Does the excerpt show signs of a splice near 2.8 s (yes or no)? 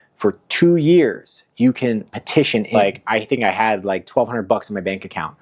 yes